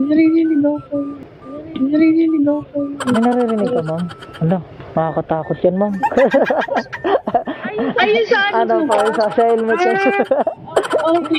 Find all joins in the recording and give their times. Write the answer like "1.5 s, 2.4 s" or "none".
none